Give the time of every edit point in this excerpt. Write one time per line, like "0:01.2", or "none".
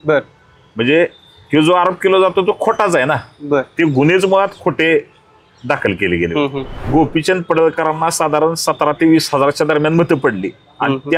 0:06.8